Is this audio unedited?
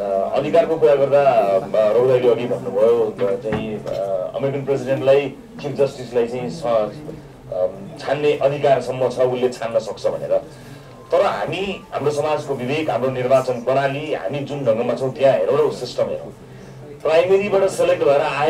yes; 0 cuts

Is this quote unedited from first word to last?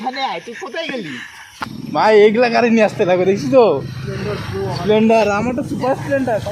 no; 1 cut; at 1.5 s

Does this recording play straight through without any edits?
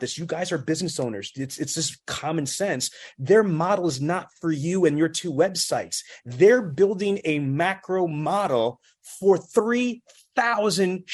yes; 0 cuts

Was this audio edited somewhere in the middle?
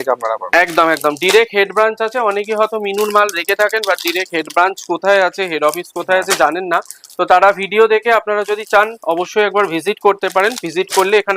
no; 0 cuts

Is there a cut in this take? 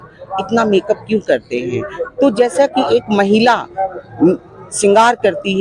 no; 0 cuts

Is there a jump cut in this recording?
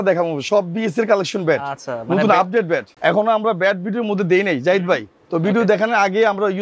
no; 0 cuts

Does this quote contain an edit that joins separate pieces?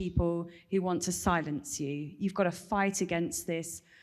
no; 0 cuts

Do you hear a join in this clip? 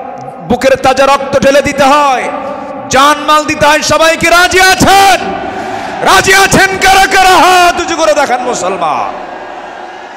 no; 0 cuts

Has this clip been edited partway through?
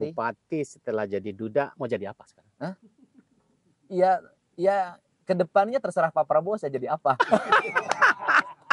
no; 0 cuts

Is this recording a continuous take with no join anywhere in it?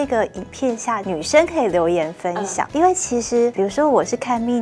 no; 3 cuts; at 1.0 s, 2.6 s, 3.5 s

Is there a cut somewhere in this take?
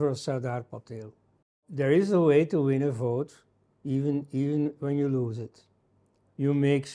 yes; 1 cut; at 1.7 s

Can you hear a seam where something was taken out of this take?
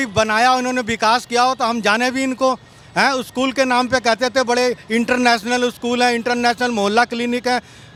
no; 0 cuts

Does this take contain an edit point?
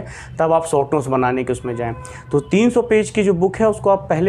no; 0 cuts

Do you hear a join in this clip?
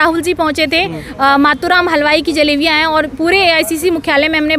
no; 0 cuts

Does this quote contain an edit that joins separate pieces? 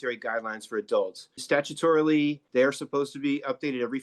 yes; 2 cuts; at 1.4 s, 2.4 s

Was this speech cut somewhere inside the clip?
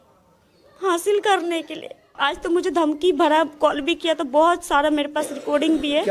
yes; 1 cut; at 2.0 s

